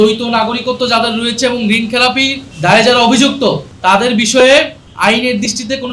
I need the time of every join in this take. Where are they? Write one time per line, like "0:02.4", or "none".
0:02.4
0:03.7
0:04.8

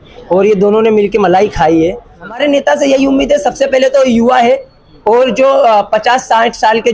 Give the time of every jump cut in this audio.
0:02.4

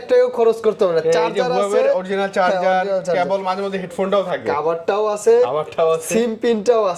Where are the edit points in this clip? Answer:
none

